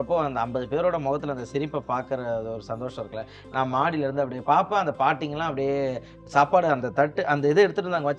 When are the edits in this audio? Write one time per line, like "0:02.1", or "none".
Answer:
0:04.4